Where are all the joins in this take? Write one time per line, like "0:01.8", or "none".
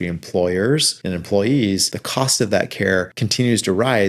0:00.9
0:02.0
0:03.2